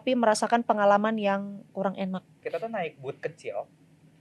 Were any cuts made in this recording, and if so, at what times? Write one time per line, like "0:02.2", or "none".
0:02.4